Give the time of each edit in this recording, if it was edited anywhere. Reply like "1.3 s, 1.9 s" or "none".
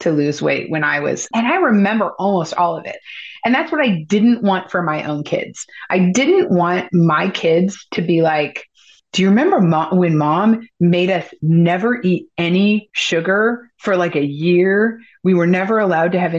1.3 s, 2.9 s